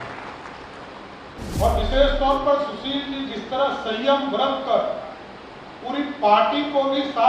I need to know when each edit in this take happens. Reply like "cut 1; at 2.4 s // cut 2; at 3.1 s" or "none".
cut 1; at 1.3 s

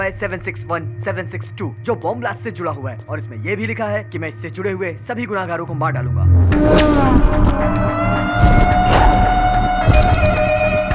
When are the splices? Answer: none

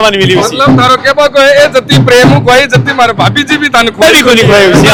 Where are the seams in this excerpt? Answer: none

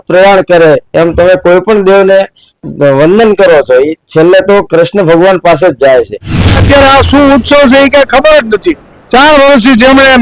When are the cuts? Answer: cut 1; at 6.5 s

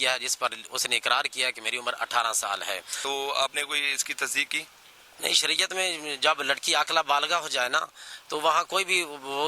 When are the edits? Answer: cut 1; at 2.9 s

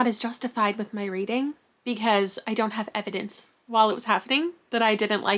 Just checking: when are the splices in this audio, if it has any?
none

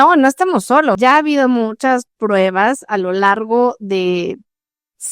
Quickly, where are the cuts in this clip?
cut 1; at 1.0 s

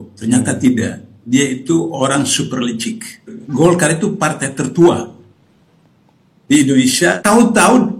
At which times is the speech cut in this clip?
cut 1; at 3.4 s // cut 2; at 7.2 s

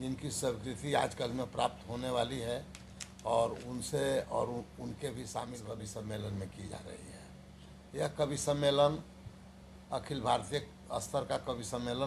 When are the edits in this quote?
cut 1; at 5.7 s

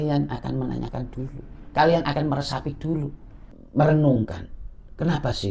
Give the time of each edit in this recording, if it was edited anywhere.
none

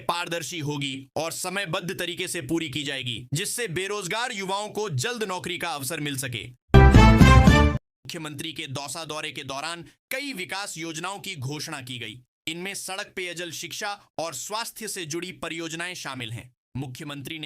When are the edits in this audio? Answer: cut 1; at 6.5 s // cut 2; at 8.0 s

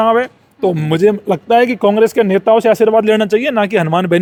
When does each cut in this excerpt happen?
none

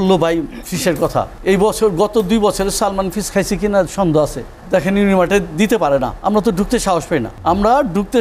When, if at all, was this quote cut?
cut 1; at 1.3 s // cut 2; at 4.5 s // cut 3; at 6.2 s // cut 4; at 7.3 s

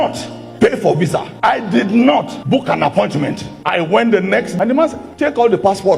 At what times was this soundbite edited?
cut 1; at 4.5 s

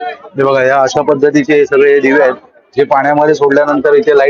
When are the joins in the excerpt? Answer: none

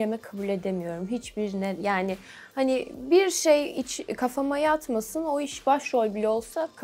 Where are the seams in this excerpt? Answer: none

